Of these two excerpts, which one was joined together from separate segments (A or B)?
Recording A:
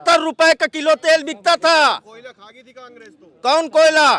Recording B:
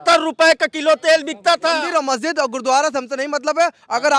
B